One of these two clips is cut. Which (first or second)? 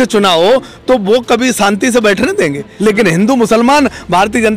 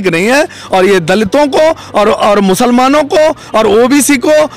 first